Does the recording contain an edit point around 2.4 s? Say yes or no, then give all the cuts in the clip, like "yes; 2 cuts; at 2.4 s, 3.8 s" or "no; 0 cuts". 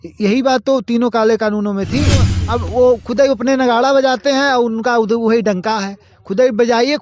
yes; 1 cut; at 2.4 s